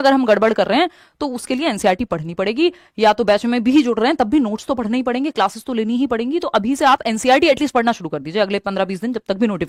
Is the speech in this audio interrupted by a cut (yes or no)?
no